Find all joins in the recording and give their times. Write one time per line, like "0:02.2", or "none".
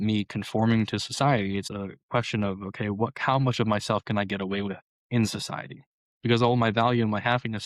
0:01.7